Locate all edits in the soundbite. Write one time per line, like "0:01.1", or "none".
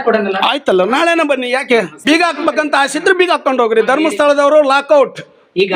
0:02.0

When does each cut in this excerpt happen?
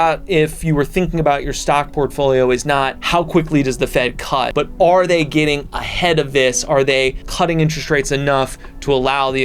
0:03.0
0:04.5
0:07.2

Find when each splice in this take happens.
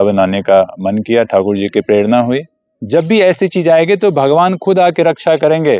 0:02.7

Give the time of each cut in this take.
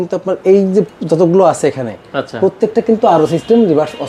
none

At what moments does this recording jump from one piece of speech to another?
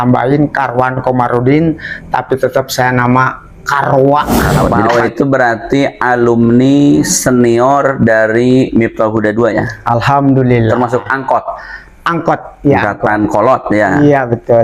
0:04.7

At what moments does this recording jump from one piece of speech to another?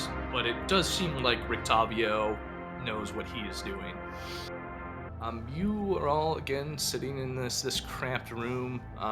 0:05.1

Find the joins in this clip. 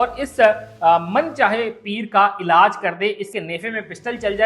0:03.4

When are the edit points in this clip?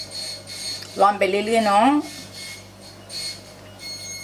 none

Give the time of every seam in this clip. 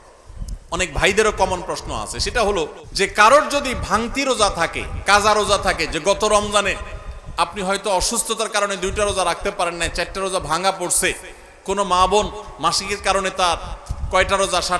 0:02.8

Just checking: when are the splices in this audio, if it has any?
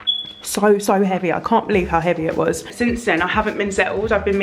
0:02.6

